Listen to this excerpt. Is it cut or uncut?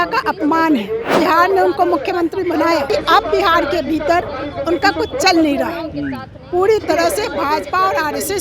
cut